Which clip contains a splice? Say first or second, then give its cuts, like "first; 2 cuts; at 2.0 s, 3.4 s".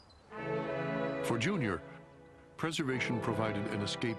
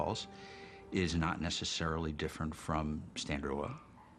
first; 1 cut; at 2.3 s